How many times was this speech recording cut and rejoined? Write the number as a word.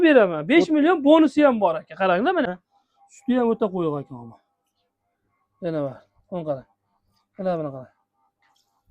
one